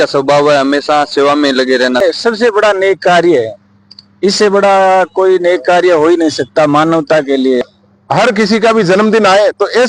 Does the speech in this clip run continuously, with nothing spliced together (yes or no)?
no